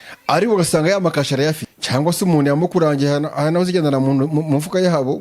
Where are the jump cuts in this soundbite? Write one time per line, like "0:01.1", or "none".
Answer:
0:01.7